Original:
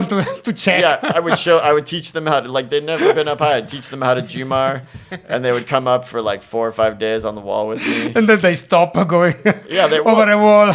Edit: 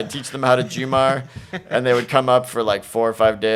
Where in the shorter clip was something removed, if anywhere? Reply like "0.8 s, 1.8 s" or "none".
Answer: none